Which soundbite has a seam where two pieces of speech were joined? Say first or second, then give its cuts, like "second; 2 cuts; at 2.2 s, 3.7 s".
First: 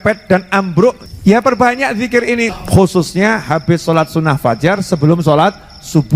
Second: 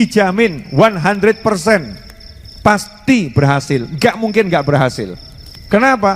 first; 2 cuts; at 1.0 s, 2.5 s